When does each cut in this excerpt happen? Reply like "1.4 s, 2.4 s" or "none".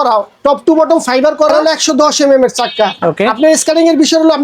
1.5 s